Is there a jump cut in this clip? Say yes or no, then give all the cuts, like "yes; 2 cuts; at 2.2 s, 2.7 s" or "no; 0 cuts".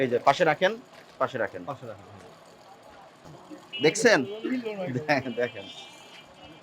yes; 1 cut; at 3.4 s